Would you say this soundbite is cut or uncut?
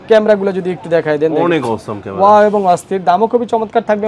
uncut